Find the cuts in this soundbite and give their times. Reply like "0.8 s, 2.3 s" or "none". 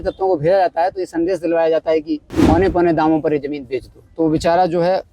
2.3 s